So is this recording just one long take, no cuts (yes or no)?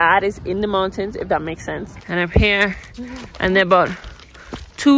no